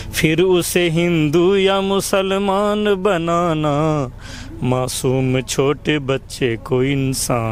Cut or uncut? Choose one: uncut